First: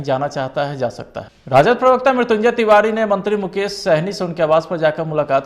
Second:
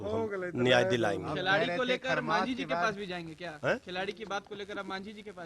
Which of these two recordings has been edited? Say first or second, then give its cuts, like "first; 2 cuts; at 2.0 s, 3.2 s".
first; 1 cut; at 1.5 s